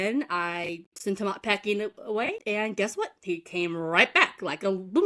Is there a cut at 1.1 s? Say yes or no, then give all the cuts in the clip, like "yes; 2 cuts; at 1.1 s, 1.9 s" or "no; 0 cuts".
no; 1 cut; at 2.4 s